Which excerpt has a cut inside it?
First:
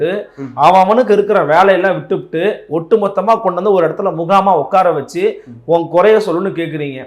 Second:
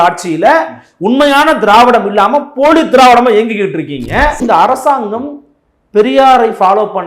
second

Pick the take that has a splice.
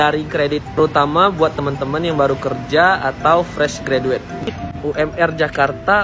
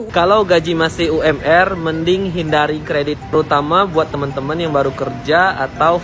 first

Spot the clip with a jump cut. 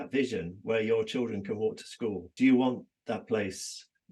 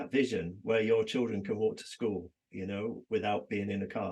first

